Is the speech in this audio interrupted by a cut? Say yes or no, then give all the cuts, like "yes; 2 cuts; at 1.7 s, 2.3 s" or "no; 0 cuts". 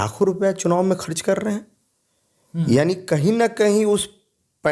no; 0 cuts